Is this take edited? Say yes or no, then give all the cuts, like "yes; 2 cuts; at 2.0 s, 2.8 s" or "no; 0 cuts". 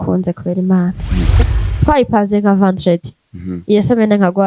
yes; 1 cut; at 1.5 s